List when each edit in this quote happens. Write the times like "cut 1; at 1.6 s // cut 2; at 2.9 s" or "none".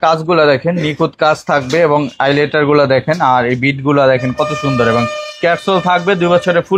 none